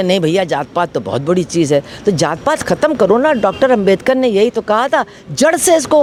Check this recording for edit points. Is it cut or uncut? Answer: uncut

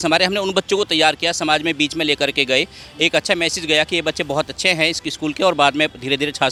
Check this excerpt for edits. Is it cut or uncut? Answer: uncut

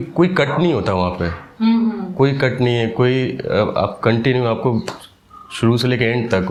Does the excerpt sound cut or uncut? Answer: uncut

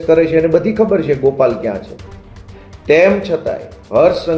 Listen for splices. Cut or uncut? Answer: uncut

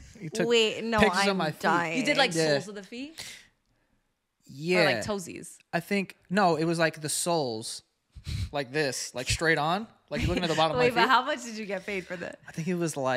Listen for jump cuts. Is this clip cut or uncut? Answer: uncut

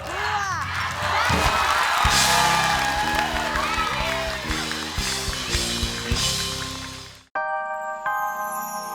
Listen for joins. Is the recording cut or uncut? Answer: cut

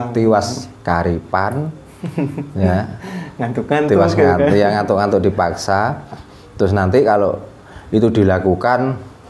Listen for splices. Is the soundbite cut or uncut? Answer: uncut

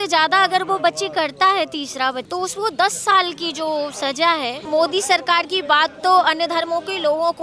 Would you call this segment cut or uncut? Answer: cut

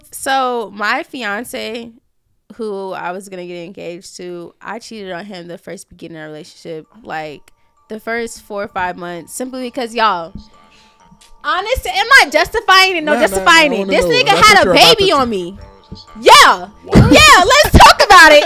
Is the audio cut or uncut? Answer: uncut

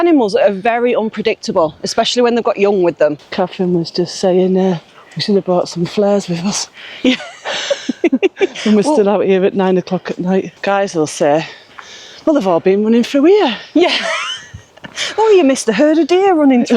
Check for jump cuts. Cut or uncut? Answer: cut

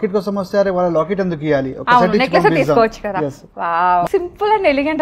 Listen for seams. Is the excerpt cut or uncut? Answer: cut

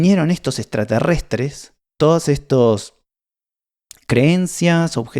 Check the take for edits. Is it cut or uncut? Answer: cut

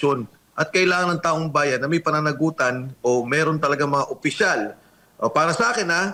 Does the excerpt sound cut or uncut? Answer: uncut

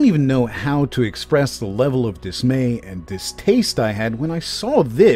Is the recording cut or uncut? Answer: uncut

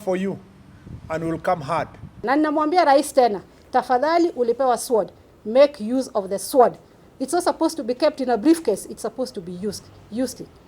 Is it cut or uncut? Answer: cut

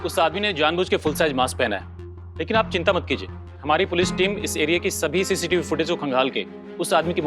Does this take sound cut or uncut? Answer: cut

